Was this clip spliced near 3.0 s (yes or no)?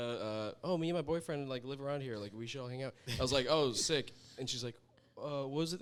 no